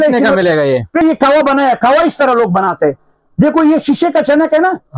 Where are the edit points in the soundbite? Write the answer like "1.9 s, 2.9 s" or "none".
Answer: 1.0 s